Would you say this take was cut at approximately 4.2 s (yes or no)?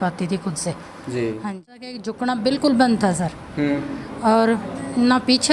no